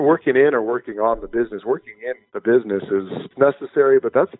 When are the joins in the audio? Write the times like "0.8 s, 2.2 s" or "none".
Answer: 3.3 s

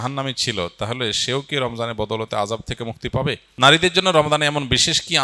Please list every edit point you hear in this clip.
3.5 s

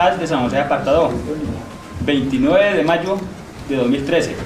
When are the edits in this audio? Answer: 2.8 s

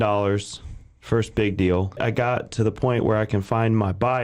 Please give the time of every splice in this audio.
2.0 s

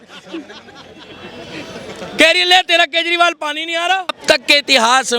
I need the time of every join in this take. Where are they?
4.2 s

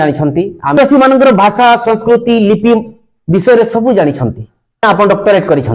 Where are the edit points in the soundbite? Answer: 0.8 s, 4.8 s

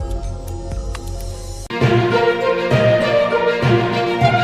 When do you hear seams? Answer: 1.7 s

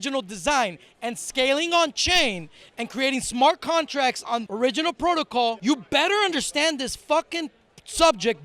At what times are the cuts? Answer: 4.3 s, 5.6 s

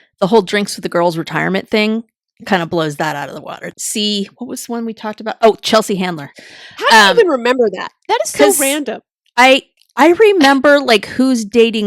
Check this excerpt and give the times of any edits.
3.7 s, 6.3 s

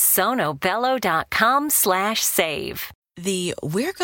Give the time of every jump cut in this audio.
3.0 s

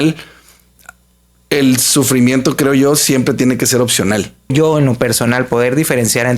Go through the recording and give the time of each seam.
4.5 s

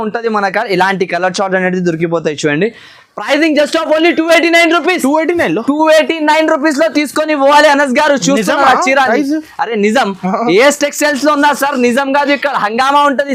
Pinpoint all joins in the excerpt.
none

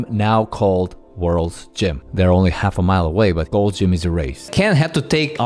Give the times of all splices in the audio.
2.0 s, 3.5 s, 4.5 s

